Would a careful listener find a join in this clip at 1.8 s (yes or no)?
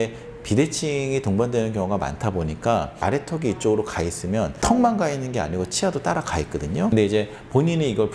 no